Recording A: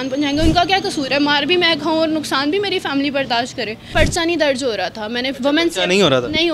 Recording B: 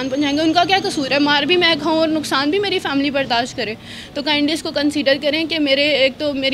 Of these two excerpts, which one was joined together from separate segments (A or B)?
A